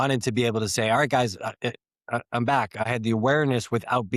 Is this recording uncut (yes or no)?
no